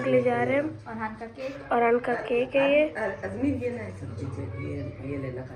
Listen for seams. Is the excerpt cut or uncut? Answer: uncut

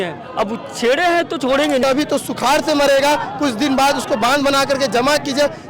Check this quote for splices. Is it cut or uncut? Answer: cut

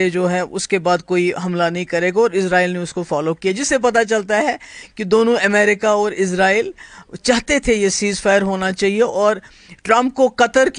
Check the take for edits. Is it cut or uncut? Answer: uncut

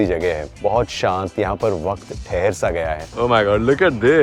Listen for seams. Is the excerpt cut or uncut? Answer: cut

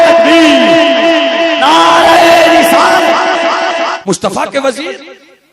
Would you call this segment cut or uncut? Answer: cut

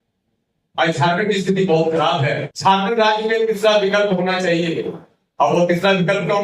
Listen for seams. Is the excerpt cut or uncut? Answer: cut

